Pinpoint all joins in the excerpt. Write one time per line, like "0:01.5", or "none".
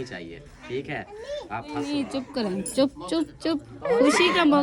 0:01.8

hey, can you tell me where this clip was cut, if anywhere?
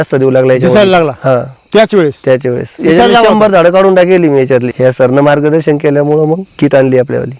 0:02.7
0:04.7
0:06.5

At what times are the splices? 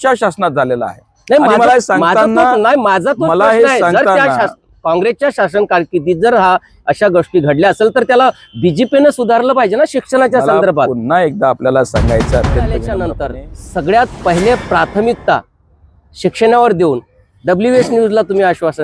0:12.9

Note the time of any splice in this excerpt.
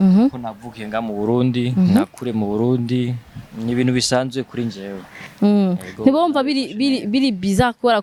none

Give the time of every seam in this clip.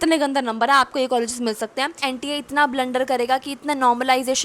0:02.0

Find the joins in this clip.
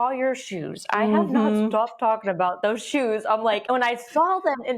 0:02.6
0:03.6

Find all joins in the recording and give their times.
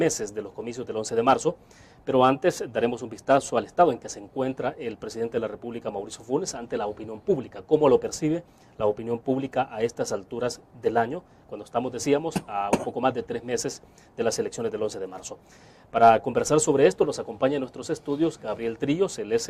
0:17.9

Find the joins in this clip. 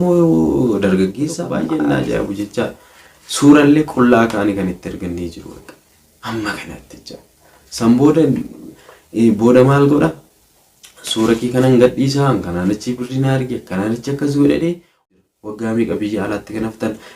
0:01.5
0:15.0

